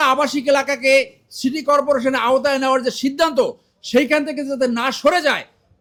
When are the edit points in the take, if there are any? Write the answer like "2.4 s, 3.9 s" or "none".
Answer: none

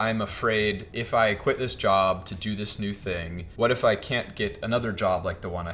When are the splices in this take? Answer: 0.9 s, 3.4 s

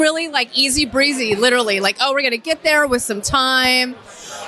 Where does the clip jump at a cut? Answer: none

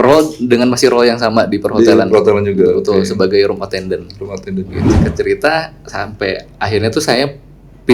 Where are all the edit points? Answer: 4.9 s

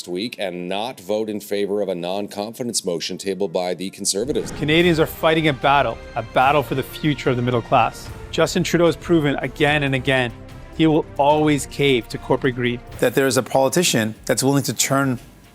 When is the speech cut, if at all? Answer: 4.5 s, 12.9 s

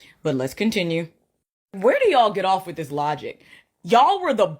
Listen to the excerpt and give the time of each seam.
3.5 s

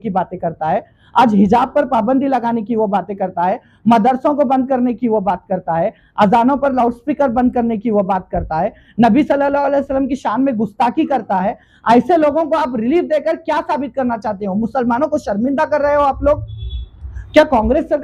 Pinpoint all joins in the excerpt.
none

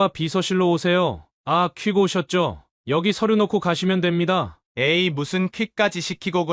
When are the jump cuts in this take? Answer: 1.3 s, 2.7 s, 4.6 s

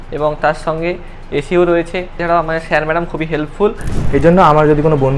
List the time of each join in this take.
2.1 s, 3.9 s

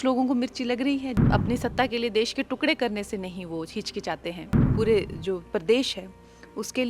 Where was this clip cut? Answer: 1.2 s, 4.6 s

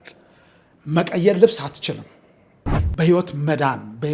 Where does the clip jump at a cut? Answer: 2.8 s

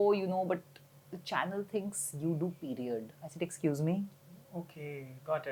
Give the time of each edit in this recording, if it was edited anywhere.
none

